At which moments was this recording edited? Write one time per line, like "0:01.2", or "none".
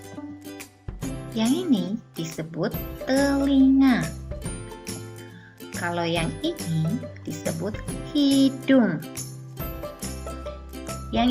0:01.3
0:04.4
0:05.8
0:09.0
0:10.5